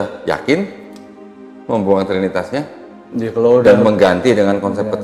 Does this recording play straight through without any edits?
yes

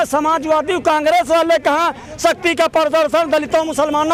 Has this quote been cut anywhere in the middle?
no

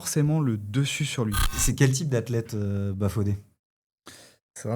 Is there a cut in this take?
yes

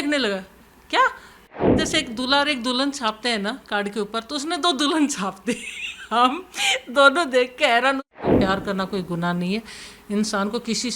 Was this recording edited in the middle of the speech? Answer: yes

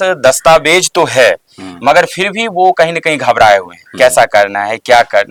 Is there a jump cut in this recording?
no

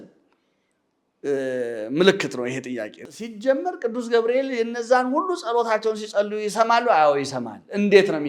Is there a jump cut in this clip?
yes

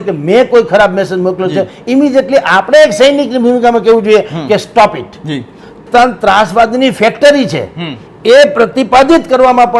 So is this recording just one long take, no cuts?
no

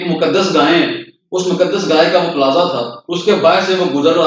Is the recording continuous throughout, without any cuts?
yes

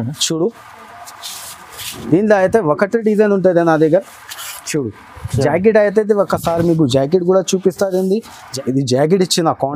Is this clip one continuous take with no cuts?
no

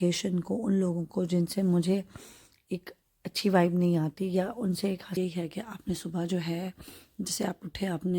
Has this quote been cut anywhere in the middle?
yes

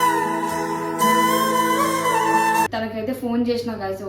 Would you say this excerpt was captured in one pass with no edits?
no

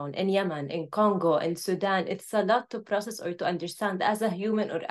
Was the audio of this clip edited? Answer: no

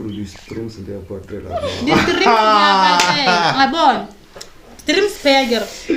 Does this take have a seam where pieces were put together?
no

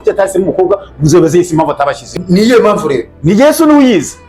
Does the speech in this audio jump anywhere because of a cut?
yes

